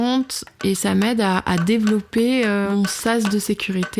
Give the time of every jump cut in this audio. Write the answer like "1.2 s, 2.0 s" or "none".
2.7 s

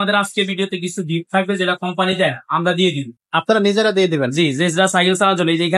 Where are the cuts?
none

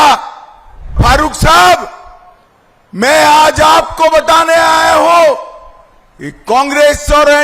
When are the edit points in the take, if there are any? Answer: 0.9 s

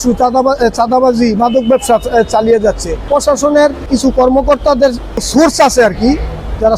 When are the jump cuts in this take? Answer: 3.0 s, 3.9 s, 5.3 s

